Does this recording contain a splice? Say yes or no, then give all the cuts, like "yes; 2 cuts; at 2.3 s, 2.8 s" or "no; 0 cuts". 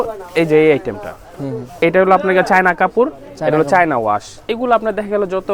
yes; 2 cuts; at 1.8 s, 4.3 s